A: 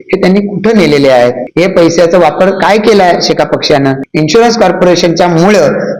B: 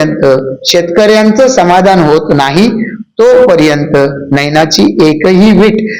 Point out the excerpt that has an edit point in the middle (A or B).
A